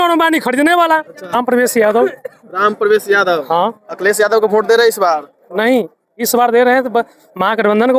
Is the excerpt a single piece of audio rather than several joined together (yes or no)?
no